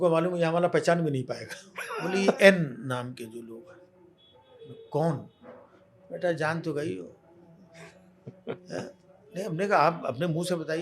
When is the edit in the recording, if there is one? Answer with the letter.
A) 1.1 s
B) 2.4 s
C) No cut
B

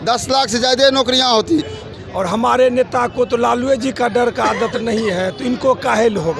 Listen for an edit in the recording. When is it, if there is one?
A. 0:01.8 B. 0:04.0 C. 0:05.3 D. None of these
A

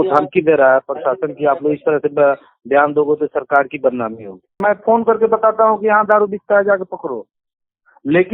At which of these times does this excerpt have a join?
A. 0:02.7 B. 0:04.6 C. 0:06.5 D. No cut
B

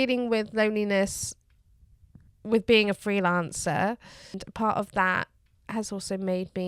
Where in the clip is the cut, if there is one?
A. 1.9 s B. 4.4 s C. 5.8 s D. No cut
B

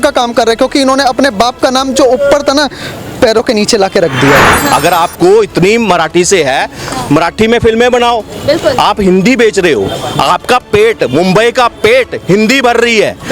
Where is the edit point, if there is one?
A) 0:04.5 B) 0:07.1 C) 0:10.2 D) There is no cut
A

